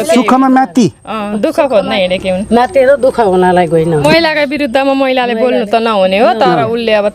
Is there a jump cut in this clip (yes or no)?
yes